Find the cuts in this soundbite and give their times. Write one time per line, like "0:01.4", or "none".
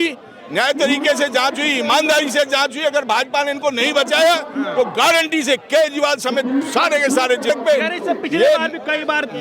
0:07.5